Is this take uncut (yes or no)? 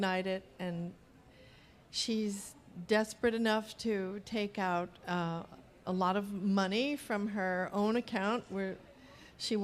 no